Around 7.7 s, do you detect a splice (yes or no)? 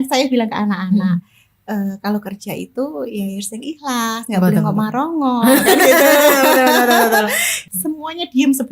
yes